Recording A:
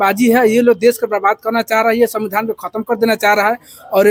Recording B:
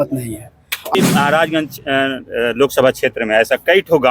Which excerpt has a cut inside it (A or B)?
B